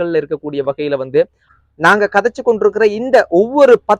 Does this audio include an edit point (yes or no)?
yes